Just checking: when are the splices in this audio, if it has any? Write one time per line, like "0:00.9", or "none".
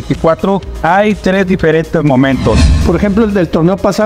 0:02.8